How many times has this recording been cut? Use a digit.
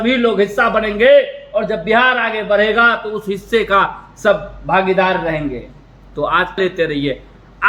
1